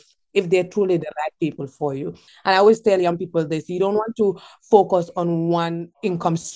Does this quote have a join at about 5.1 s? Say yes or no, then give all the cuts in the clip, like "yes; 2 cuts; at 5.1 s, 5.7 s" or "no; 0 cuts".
no; 1 cut; at 2.3 s